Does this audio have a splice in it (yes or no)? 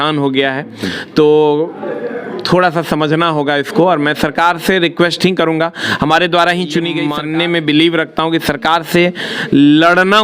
yes